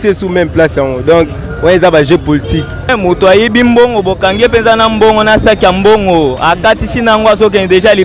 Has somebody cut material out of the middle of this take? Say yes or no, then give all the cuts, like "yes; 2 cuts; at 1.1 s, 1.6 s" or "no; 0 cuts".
yes; 1 cut; at 2.9 s